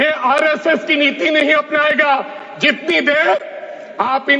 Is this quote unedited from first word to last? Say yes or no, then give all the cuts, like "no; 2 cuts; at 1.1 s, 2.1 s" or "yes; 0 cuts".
yes; 0 cuts